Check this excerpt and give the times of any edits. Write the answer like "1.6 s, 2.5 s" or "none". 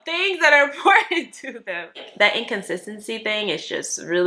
2.1 s